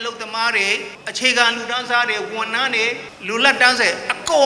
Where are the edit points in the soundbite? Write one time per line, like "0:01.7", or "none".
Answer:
0:01.0
0:03.1